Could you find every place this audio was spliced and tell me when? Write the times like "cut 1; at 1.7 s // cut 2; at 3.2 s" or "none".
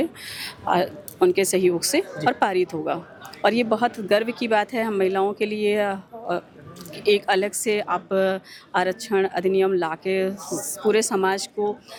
none